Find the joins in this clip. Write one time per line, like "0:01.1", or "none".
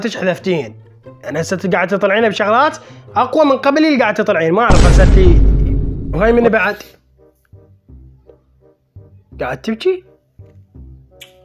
0:06.1